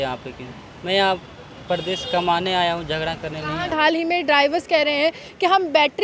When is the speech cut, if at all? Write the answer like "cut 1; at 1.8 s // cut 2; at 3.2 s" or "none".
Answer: cut 1; at 3.7 s